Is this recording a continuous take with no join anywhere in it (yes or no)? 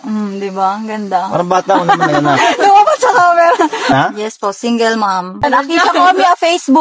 no